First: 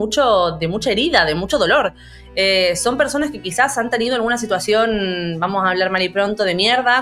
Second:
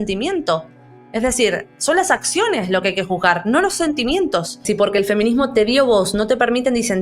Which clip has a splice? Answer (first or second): second